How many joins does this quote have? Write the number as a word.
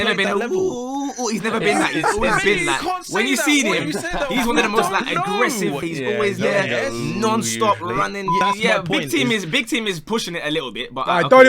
two